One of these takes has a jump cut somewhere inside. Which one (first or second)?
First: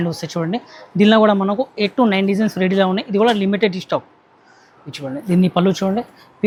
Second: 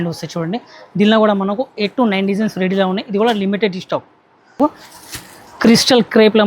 second